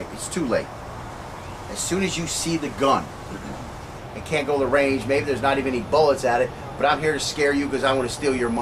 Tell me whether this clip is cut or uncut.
uncut